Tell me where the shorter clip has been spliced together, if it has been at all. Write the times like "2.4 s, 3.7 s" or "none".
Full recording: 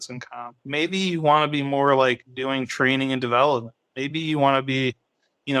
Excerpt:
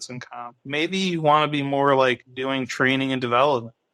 none